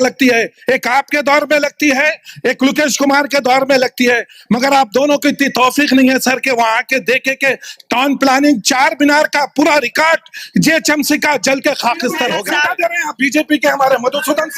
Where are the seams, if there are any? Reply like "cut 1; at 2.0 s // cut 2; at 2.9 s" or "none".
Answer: cut 1; at 12.4 s